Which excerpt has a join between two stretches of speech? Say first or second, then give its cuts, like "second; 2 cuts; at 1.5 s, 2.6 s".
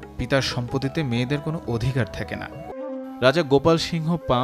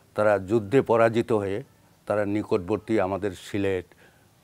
first; 1 cut; at 2.8 s